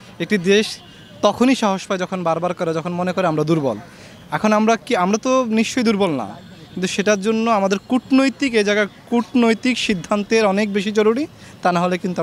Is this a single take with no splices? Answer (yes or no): yes